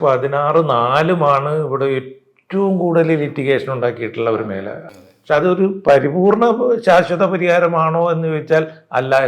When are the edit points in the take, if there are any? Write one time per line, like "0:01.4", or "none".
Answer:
0:04.8